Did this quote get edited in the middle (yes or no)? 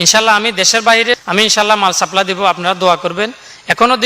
yes